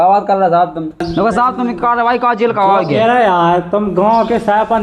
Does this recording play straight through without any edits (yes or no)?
no